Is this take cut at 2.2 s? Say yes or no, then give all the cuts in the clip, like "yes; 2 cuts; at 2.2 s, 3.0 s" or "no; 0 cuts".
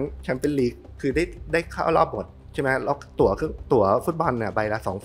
no; 0 cuts